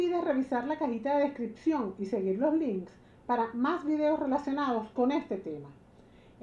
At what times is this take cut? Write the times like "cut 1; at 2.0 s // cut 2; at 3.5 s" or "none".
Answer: none

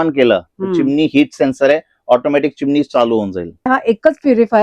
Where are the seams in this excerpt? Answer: cut 1; at 3.7 s

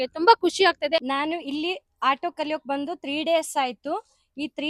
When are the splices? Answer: cut 1; at 1.4 s

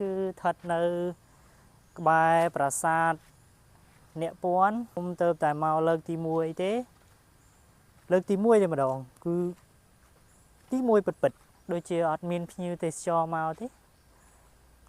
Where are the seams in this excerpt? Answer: cut 1; at 5.0 s // cut 2; at 11.5 s

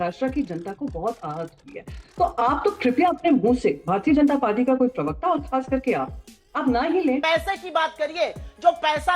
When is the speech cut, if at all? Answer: cut 1; at 7.2 s

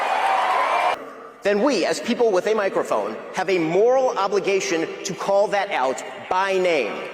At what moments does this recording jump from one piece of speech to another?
cut 1; at 0.9 s

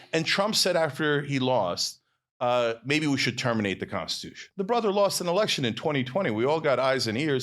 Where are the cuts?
cut 1; at 4.4 s

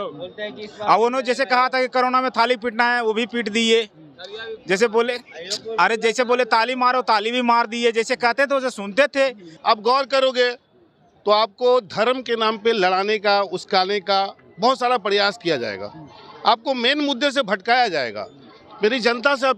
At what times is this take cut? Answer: cut 1; at 9.5 s

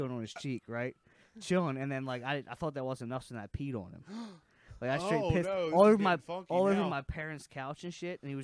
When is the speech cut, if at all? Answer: none

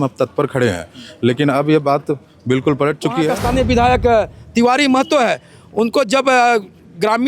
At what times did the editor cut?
cut 1; at 3.4 s

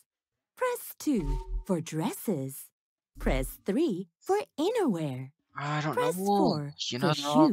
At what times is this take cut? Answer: none

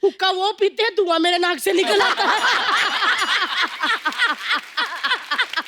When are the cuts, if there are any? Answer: none

